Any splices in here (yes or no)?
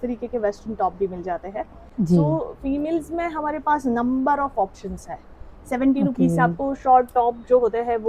no